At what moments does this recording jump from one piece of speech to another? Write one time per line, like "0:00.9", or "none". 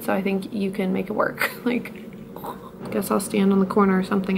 0:02.7